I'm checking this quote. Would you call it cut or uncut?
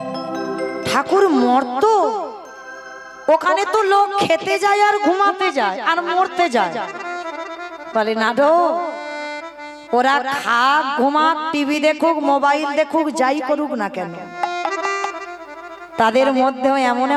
uncut